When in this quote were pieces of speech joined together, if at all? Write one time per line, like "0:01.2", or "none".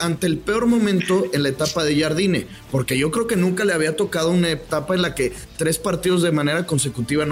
none